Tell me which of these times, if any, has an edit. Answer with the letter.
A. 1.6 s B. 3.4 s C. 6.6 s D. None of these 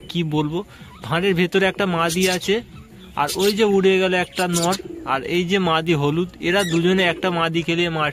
D